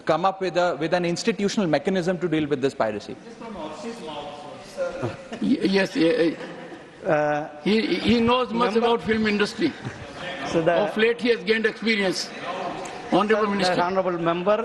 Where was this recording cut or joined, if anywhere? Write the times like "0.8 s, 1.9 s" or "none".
none